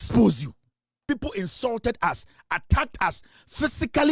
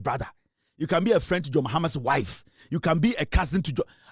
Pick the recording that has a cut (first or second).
first